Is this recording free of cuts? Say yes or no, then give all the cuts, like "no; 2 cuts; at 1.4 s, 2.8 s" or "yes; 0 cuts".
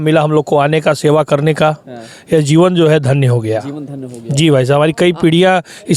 yes; 0 cuts